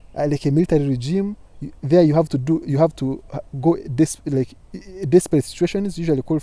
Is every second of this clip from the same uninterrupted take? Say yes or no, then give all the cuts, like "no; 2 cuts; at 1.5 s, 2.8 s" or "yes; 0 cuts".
yes; 0 cuts